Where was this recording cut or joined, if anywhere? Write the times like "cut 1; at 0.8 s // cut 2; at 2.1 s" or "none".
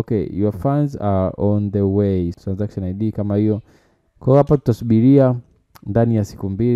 cut 1; at 2.3 s